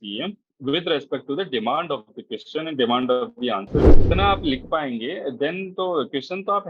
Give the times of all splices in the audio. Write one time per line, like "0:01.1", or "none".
0:03.8

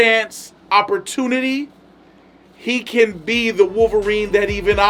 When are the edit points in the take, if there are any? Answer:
none

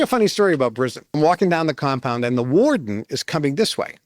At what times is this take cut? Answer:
0:01.1

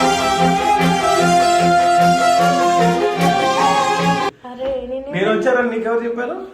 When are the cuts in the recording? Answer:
0:04.4

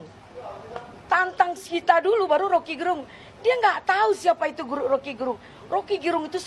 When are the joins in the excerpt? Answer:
none

